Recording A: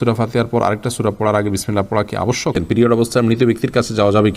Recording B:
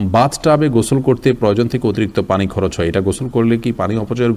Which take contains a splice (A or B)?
A